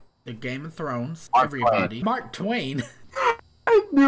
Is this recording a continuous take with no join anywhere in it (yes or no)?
no